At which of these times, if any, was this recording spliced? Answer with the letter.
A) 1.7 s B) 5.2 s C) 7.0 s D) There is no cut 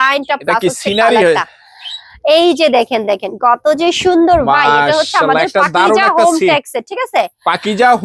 D